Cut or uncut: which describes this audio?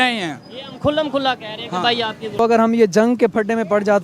cut